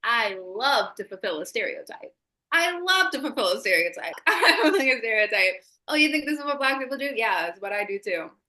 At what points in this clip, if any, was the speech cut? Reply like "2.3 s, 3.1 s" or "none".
4.2 s

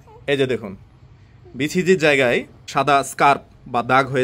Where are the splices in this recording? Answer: 2.6 s

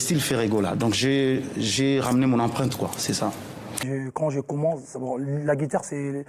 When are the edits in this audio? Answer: 3.9 s

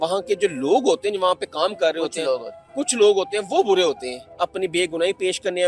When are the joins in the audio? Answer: 4.2 s

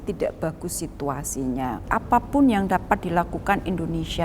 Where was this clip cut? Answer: 1.8 s

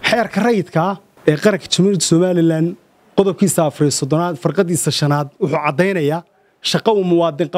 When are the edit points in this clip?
1.1 s

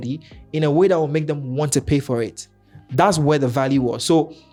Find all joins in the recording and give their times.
none

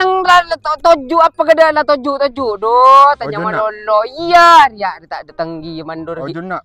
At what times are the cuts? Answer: none

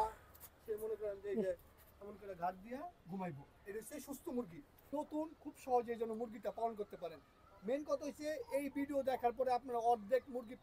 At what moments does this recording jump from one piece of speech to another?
4.9 s

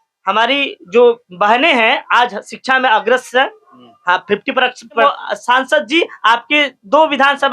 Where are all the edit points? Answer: 5.0 s

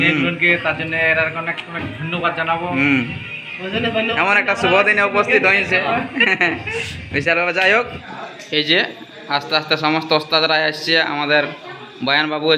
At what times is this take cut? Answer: 8.0 s

